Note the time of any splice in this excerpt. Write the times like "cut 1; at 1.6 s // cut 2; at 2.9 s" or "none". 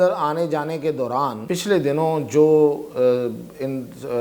cut 1; at 1.4 s